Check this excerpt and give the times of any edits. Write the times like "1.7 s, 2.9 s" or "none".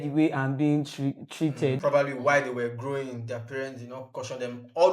1.8 s